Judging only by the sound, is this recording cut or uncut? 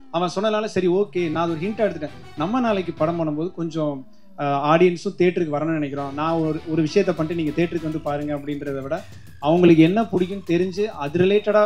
uncut